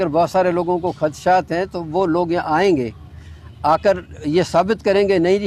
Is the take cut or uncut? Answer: uncut